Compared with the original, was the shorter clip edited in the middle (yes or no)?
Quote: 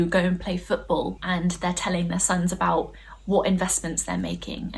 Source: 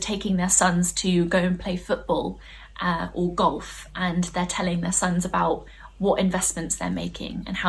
yes